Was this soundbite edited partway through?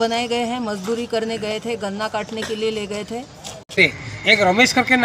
yes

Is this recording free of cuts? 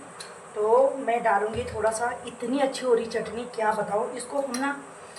yes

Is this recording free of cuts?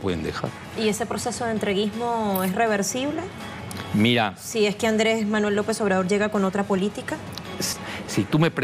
no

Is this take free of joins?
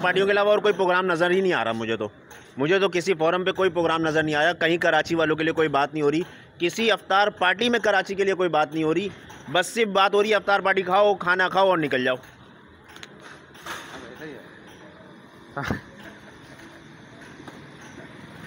yes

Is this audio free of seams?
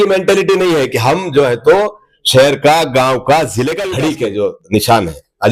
no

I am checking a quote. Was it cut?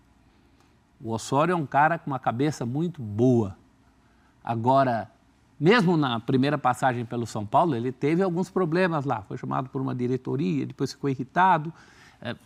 no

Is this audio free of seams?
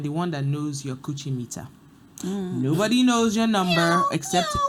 yes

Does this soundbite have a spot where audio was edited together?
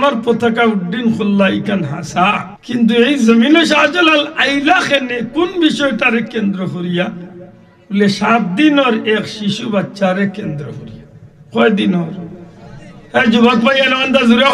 yes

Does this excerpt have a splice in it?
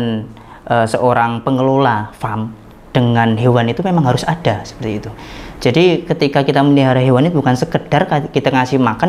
no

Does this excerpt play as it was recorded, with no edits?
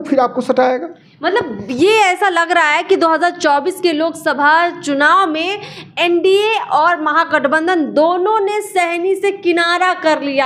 yes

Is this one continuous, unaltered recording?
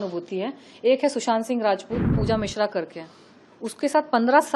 no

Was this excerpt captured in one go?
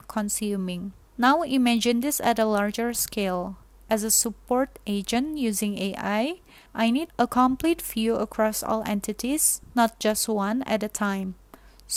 yes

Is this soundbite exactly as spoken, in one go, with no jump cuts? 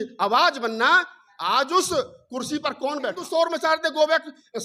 no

